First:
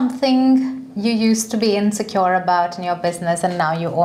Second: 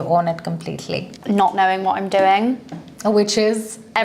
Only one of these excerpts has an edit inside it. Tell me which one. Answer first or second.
second